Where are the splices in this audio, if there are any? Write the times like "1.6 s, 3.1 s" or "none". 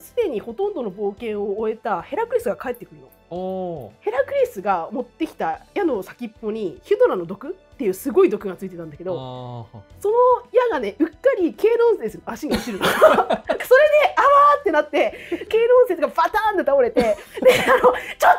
3.9 s, 13.6 s, 15.4 s